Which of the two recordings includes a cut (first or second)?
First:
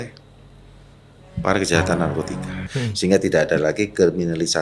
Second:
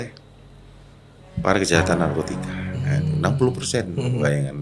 first